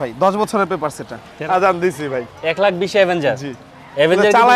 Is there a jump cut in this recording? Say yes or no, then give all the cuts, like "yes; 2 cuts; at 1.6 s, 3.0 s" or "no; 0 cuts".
yes; 1 cut; at 1.3 s